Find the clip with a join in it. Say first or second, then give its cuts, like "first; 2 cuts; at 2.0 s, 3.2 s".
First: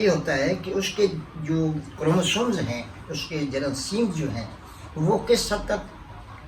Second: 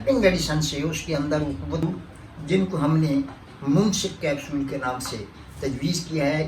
second; 1 cut; at 1.8 s